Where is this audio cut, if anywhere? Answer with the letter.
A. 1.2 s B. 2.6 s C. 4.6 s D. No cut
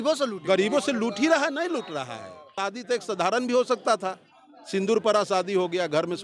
B